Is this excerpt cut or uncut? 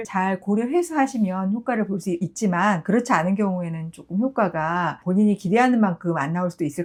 uncut